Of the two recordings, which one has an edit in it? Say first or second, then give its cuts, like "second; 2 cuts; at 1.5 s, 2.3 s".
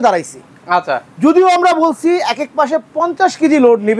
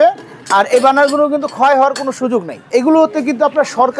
second; 1 cut; at 2.7 s